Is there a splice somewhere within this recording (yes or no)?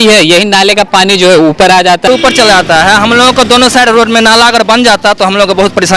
yes